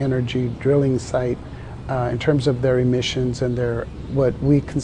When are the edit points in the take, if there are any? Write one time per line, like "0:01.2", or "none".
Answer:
0:03.4